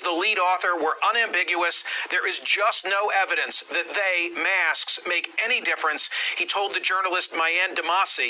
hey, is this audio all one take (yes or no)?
no